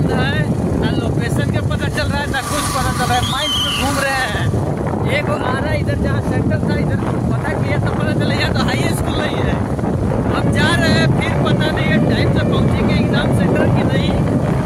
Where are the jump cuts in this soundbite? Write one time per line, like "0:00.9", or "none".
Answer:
none

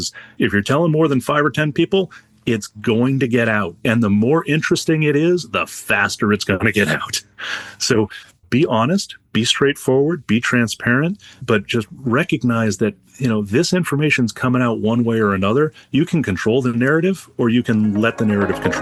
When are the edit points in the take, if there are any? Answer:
none

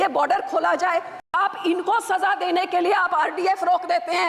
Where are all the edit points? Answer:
0:01.3

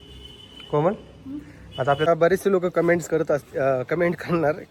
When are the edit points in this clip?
0:02.1

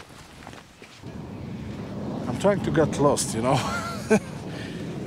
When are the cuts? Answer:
0:01.0

